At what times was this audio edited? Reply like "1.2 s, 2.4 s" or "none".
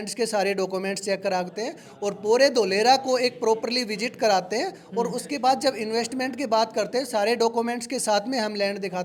none